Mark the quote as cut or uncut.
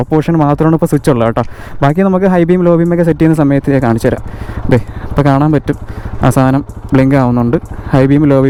uncut